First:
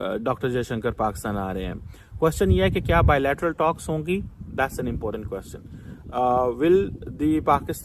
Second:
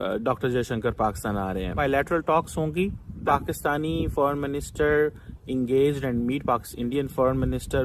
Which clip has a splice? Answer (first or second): second